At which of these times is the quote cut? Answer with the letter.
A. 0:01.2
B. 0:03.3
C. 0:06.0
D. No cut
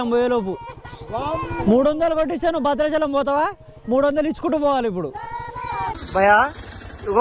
C